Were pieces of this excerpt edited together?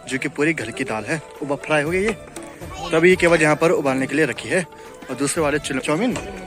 no; 0 cuts

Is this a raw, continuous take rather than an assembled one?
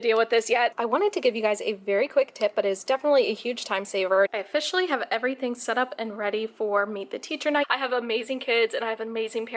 no; 3 cuts; at 0.7 s, 4.3 s, 7.6 s

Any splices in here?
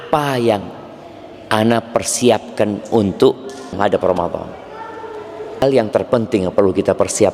yes; 2 cuts; at 3.8 s, 5.6 s

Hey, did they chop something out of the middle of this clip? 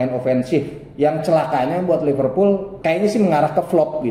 yes; 1 cut; at 2.7 s

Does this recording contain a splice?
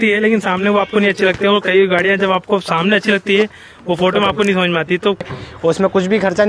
yes; 1 cut; at 5.2 s

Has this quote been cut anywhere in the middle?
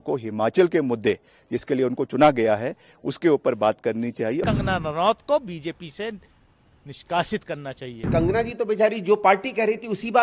yes; 2 cuts; at 4.4 s, 8.1 s

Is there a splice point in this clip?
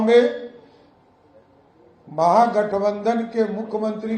no; 0 cuts

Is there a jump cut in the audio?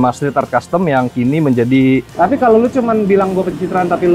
yes; 1 cut; at 2.1 s

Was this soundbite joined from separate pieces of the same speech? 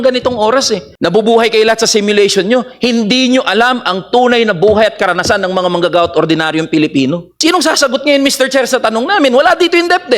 yes; 2 cuts; at 0.9 s, 7.3 s

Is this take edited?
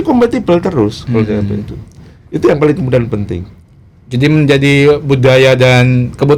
no; 0 cuts

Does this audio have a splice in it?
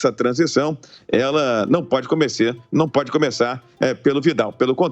no; 0 cuts

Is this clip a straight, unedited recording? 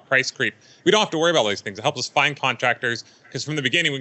no; 1 cut; at 2.3 s

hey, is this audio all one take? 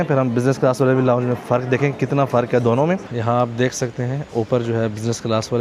no; 1 cut; at 3.1 s

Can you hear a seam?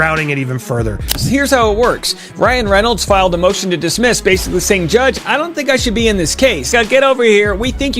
yes; 2 cuts; at 1.1 s, 6.7 s

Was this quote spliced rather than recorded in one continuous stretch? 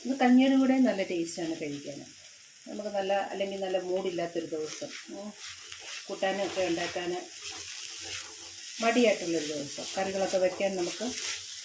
no; 0 cuts

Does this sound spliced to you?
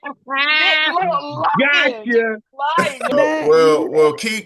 yes; 1 cut; at 3.1 s

